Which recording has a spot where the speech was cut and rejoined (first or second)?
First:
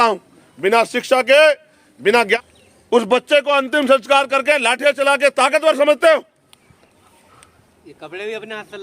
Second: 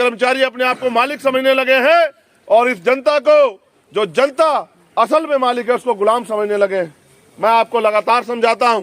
first